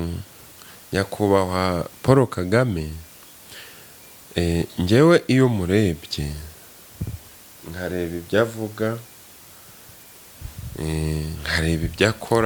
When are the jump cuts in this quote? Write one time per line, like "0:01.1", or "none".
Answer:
none